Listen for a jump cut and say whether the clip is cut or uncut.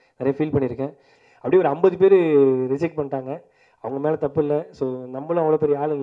cut